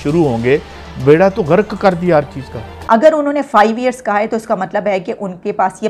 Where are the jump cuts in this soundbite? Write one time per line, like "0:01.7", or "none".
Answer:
0:02.8